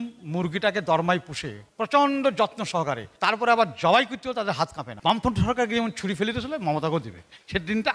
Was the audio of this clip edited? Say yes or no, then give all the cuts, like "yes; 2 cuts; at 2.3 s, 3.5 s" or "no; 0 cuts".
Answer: no; 0 cuts